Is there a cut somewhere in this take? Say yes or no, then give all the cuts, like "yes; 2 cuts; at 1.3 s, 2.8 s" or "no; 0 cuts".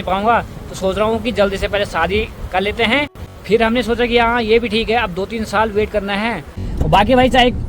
yes; 2 cuts; at 3.3 s, 6.6 s